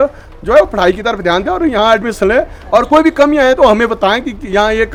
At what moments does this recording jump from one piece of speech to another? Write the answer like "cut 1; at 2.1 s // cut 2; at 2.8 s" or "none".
none